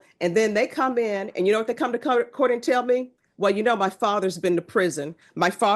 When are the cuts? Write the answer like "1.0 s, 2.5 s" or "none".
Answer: none